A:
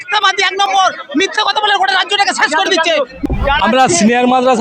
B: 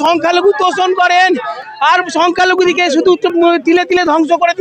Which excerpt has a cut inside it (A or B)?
A